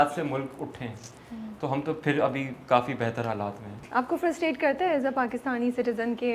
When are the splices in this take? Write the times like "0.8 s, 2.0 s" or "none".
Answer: none